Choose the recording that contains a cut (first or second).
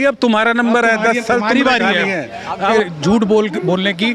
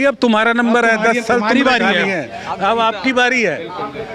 first